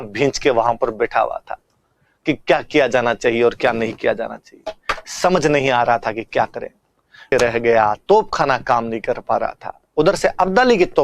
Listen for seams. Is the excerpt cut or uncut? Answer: cut